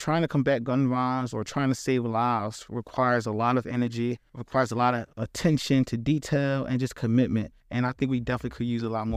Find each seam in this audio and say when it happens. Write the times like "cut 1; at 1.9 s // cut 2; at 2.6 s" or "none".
none